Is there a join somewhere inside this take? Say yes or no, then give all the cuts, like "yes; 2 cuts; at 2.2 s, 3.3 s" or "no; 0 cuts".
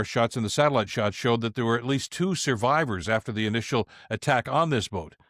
no; 0 cuts